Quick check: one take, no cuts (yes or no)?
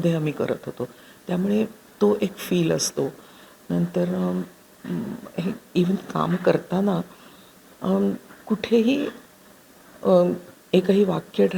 yes